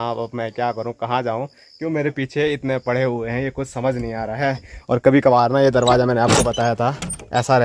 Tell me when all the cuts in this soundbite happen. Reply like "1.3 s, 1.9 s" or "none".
none